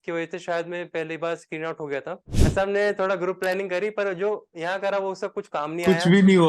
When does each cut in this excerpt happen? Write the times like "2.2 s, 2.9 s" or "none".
2.4 s